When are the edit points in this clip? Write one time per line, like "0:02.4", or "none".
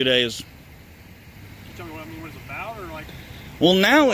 none